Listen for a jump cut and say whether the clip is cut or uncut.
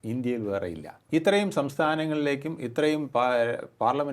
cut